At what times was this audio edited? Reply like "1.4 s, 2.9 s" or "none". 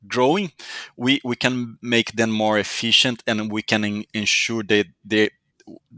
none